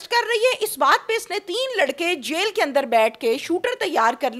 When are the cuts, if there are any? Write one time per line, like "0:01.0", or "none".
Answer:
none